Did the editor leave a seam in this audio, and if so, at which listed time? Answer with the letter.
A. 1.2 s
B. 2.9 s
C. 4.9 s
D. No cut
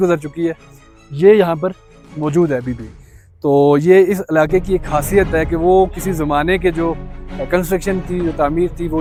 D